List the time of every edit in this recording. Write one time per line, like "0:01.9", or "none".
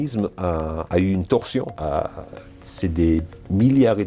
none